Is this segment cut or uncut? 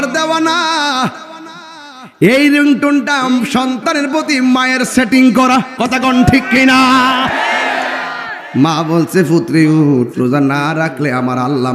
cut